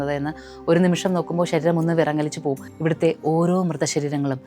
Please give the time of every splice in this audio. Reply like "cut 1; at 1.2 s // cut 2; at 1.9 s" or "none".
cut 1; at 2.7 s

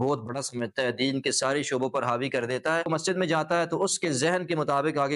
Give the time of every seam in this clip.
cut 1; at 2.9 s

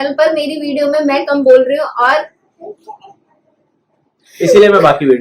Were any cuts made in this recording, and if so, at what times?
none

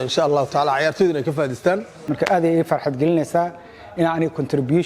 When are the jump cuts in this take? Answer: cut 1; at 2.0 s

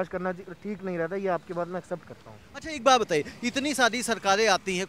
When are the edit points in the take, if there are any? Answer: none

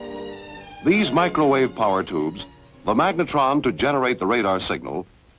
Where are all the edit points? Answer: cut 1; at 3.3 s

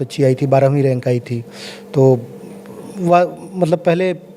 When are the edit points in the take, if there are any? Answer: none

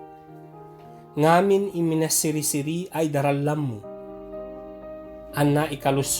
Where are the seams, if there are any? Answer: none

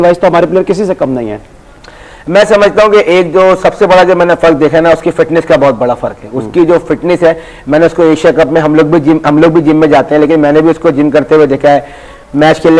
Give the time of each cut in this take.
cut 1; at 1.8 s

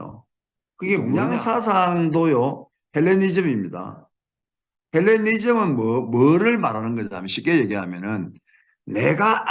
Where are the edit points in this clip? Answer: cut 1; at 1.3 s

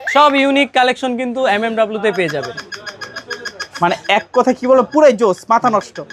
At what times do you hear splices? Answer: none

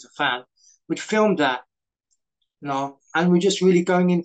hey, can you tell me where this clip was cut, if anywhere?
cut 1; at 3.0 s

